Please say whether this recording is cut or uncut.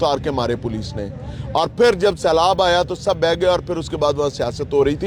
uncut